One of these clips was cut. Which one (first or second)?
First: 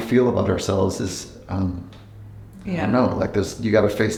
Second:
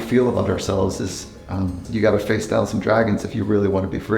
second